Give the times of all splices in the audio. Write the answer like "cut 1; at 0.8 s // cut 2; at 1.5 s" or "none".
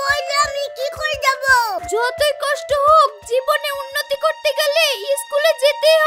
cut 1; at 1.8 s